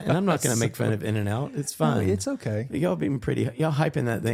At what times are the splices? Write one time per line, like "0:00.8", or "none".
none